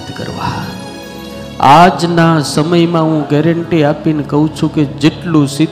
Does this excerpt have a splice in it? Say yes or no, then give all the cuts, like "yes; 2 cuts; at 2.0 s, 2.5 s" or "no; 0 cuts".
yes; 1 cut; at 1.1 s